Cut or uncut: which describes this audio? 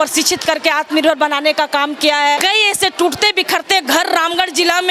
cut